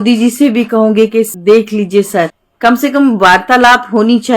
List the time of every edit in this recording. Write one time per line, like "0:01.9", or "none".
0:01.3
0:02.4